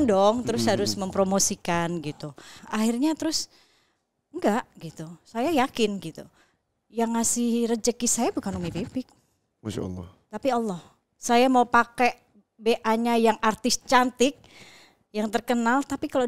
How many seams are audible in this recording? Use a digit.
1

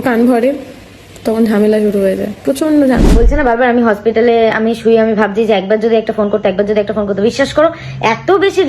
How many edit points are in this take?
1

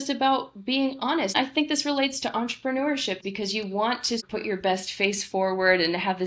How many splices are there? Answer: 3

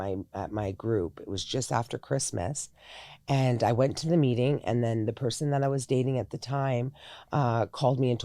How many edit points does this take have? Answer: 0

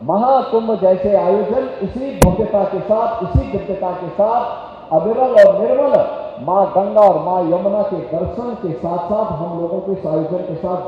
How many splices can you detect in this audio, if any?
0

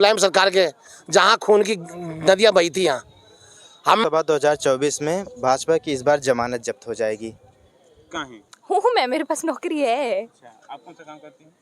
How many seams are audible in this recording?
2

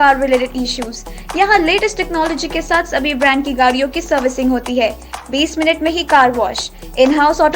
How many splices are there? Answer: 0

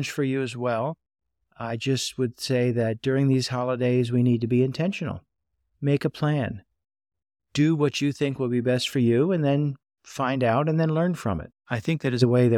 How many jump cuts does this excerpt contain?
1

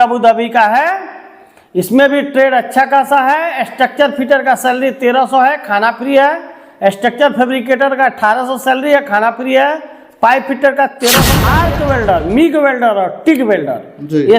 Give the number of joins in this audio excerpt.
1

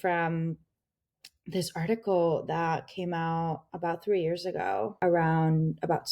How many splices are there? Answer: 1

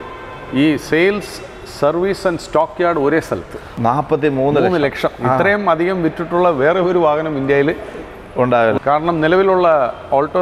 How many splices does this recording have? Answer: 2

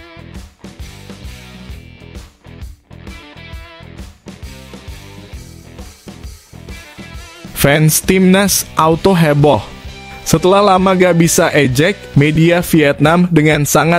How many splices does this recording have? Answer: 0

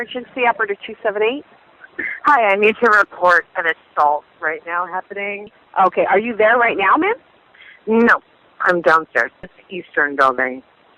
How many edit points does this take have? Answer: 0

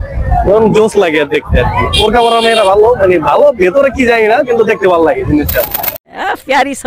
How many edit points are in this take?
1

